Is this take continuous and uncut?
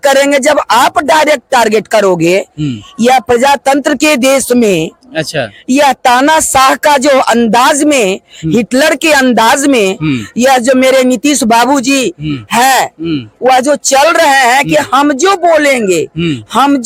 yes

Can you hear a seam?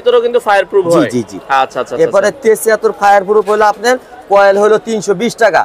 no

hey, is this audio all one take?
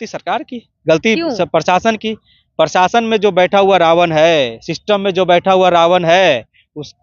yes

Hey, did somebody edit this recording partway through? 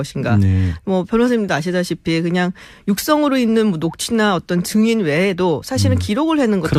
no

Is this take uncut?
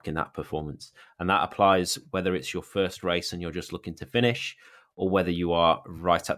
yes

